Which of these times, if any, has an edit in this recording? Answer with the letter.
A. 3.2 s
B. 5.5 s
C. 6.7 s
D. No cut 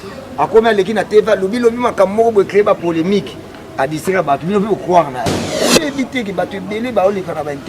B